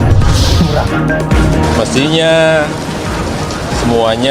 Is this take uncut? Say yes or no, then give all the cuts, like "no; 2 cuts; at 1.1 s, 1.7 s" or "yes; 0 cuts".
yes; 0 cuts